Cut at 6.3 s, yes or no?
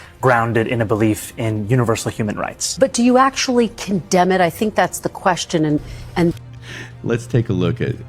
yes